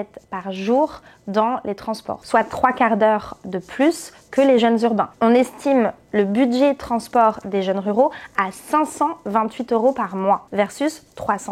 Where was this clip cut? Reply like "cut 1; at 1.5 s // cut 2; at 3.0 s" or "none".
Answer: cut 1; at 2.2 s // cut 2; at 5.1 s